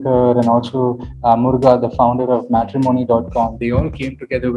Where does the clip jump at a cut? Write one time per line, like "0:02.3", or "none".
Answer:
none